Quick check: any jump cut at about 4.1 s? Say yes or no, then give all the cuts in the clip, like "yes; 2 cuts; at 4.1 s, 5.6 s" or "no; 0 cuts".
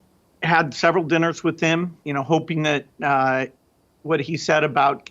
no; 1 cut; at 2.0 s